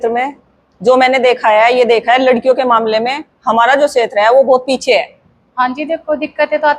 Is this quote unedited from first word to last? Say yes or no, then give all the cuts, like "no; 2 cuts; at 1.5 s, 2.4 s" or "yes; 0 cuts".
no; 1 cut; at 5.5 s